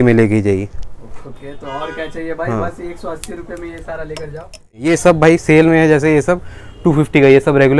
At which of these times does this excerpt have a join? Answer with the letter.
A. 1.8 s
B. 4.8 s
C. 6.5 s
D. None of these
B